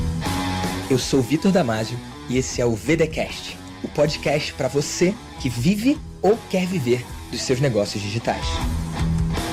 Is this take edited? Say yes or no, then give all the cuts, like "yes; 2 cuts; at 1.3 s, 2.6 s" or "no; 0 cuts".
no; 0 cuts